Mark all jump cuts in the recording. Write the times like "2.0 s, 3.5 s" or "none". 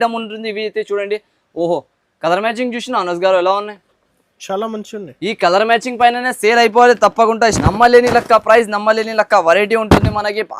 7.6 s